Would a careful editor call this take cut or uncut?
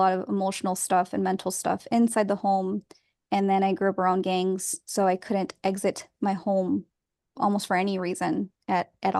uncut